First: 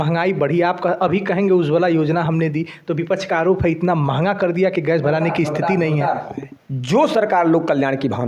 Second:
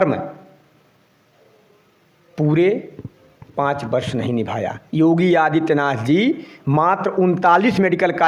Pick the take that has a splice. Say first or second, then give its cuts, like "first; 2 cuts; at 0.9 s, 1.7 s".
first; 1 cut; at 6.3 s